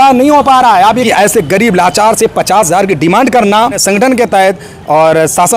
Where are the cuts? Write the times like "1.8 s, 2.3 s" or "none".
1.0 s, 3.8 s

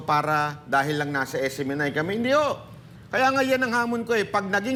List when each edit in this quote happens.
none

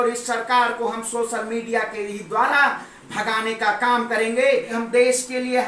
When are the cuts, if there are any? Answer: 4.7 s

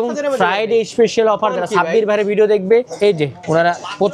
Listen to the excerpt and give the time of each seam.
2.9 s

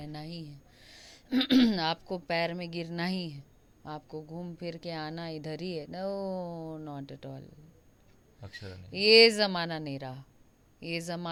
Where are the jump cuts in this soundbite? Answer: none

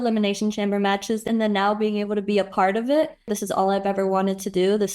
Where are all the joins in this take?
1.2 s, 3.3 s

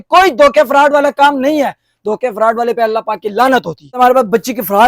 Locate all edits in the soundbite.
4.0 s

